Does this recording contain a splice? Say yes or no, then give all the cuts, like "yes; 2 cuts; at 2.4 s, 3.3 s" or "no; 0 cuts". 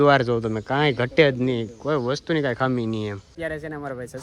yes; 1 cut; at 3.2 s